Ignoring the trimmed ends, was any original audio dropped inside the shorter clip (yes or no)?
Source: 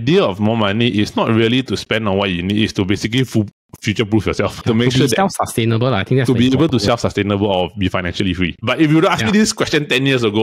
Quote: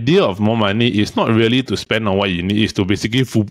no